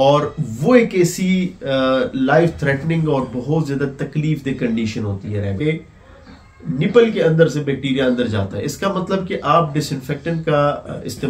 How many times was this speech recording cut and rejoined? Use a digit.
1